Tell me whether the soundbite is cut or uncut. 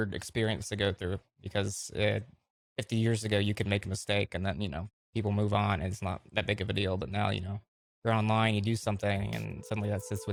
uncut